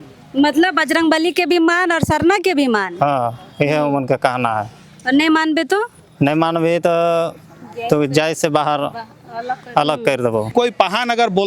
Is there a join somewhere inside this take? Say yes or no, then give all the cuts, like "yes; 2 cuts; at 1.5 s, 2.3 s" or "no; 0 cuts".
yes; 1 cut; at 10.5 s